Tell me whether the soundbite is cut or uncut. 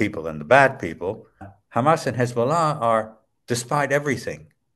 cut